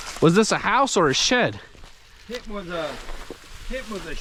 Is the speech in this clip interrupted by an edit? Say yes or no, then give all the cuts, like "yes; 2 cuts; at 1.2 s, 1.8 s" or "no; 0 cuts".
no; 0 cuts